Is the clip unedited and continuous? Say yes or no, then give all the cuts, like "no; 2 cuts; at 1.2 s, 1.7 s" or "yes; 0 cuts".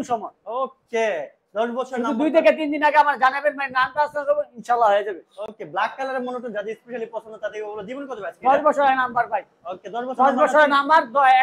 yes; 0 cuts